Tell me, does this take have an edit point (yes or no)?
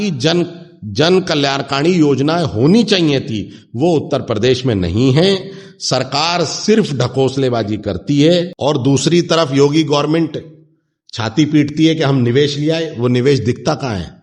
yes